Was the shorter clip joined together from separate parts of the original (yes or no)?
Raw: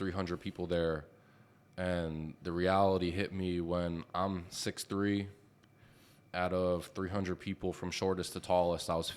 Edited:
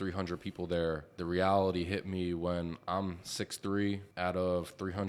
yes